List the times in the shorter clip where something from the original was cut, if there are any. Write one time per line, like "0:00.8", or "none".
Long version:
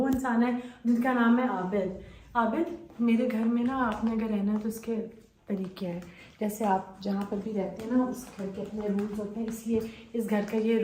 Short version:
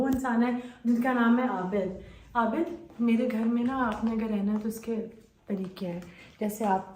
none